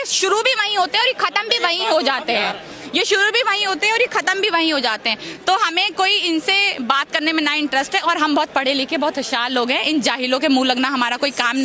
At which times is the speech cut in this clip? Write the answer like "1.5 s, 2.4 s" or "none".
none